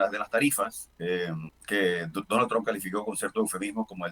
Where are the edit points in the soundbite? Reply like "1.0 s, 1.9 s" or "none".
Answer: 1.5 s